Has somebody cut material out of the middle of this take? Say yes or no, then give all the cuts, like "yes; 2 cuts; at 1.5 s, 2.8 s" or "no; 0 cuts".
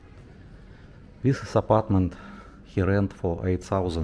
no; 0 cuts